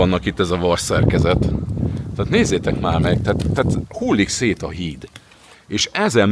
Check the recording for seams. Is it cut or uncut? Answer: uncut